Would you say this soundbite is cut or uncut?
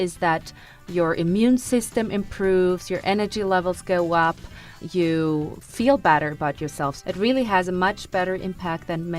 cut